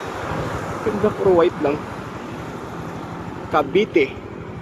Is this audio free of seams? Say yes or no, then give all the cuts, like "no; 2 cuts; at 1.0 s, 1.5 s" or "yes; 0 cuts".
yes; 0 cuts